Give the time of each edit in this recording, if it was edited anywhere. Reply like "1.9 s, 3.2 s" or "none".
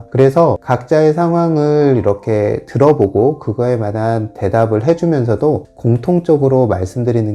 5.7 s